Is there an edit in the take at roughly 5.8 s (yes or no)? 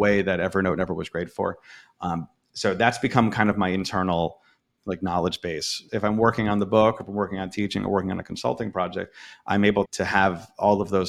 yes